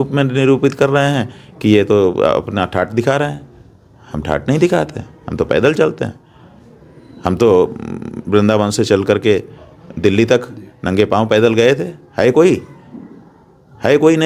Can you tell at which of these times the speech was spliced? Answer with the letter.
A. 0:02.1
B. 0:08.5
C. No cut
C